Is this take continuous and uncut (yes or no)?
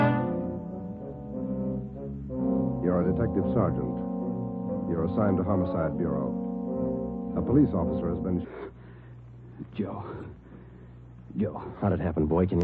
yes